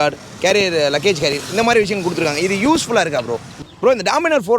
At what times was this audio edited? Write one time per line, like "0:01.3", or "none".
0:03.5